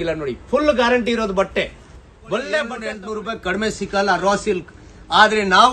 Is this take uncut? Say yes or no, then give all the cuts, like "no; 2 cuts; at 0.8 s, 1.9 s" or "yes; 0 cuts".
no; 1 cut; at 2.9 s